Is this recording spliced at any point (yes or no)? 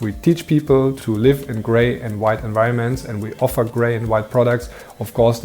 yes